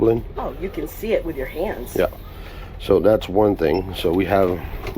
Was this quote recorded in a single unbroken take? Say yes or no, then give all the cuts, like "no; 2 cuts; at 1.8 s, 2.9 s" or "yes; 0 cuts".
yes; 0 cuts